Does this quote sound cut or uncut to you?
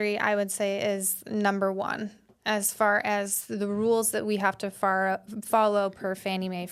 uncut